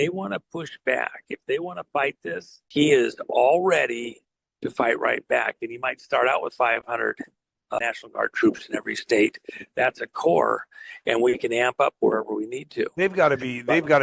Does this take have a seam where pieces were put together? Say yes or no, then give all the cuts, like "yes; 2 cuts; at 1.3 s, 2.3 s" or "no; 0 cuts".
yes; 2 cuts; at 2.5 s, 7.8 s